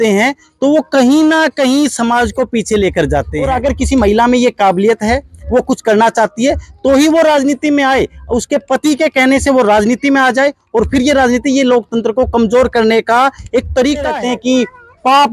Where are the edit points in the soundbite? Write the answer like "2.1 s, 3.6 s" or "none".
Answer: 3.4 s, 14.1 s

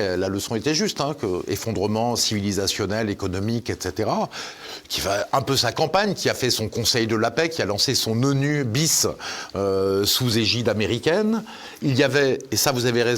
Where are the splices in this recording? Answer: none

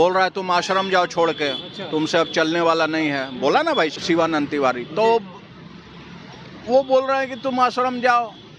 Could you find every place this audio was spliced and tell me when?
none

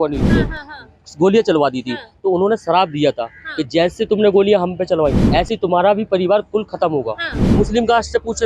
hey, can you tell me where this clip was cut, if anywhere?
7.4 s

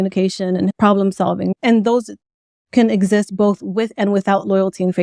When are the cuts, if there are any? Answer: 0.7 s, 1.5 s

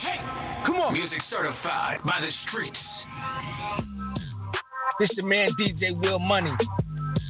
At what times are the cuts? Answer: none

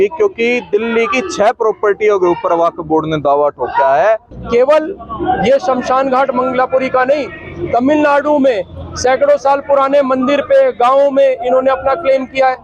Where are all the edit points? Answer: 4.3 s

